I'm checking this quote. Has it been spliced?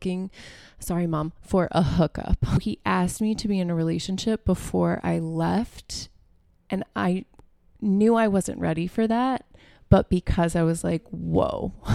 yes; 1 cut; at 2.6 s

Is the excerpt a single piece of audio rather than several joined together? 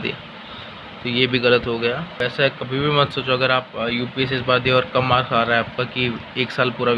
no; 1 cut; at 2.2 s

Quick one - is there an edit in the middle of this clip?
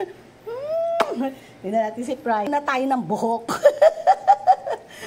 yes; 1 cut; at 2.5 s

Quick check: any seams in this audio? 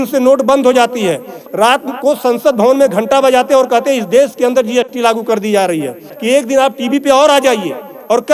yes; 2 cuts; at 1.4 s, 6.1 s

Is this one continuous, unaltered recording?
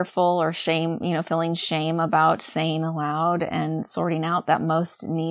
yes; 0 cuts

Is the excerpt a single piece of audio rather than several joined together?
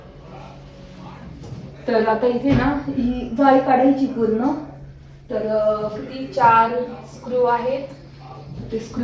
yes; 0 cuts

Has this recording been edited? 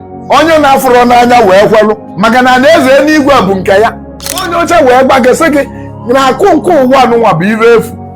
yes; 2 cuts; at 2.1 s, 4.5 s

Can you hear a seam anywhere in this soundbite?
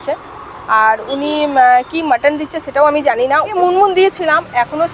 yes; 1 cut; at 3.5 s

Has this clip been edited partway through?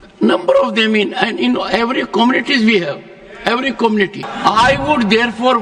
yes; 1 cut; at 4.2 s

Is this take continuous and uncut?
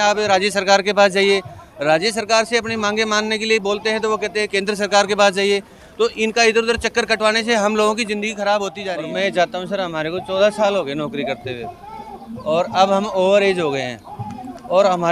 no; 1 cut; at 8.8 s

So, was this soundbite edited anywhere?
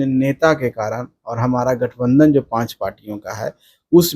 no; 0 cuts

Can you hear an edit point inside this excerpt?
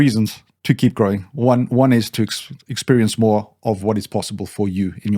no; 0 cuts

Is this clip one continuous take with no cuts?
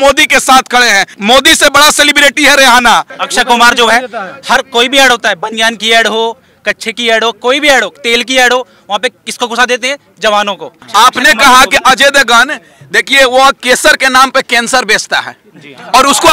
no; 3 cuts; at 1.1 s, 3.2 s, 10.7 s

